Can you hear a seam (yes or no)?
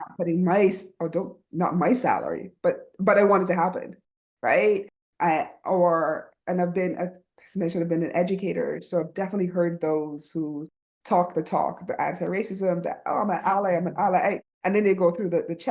no